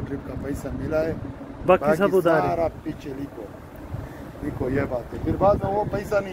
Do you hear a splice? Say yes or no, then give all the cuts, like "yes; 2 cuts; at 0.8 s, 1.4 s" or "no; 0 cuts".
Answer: no; 0 cuts